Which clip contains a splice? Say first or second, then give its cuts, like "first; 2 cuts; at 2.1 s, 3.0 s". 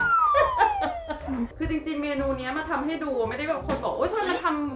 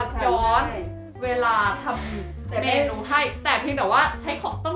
first; 1 cut; at 1.5 s